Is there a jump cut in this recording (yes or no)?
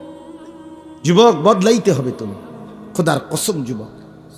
yes